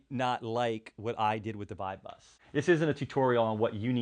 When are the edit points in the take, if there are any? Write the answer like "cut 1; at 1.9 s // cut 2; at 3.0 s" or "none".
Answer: cut 1; at 2.3 s